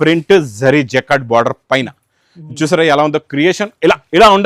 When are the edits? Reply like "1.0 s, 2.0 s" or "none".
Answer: none